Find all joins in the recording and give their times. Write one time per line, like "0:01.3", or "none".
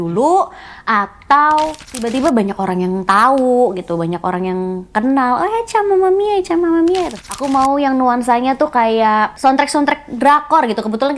0:02.1
0:07.2
0:09.3